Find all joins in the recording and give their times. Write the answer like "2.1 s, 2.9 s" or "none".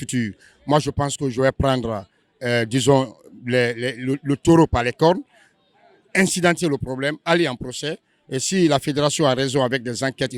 none